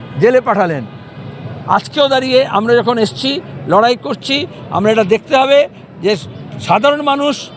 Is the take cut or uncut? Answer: uncut